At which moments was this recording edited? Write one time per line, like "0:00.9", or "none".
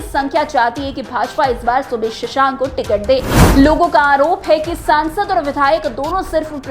0:03.4